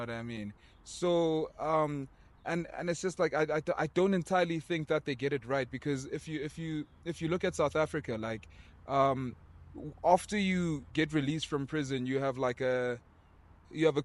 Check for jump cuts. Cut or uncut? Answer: uncut